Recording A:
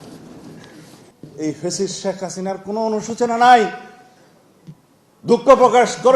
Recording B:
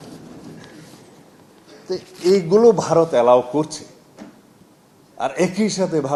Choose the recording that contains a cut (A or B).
A